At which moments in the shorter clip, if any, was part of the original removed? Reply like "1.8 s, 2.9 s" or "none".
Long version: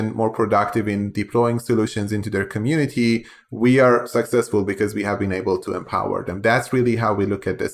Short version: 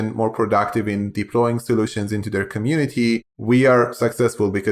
3.3 s